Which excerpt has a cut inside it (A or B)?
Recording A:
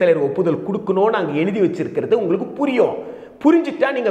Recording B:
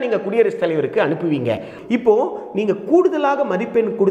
B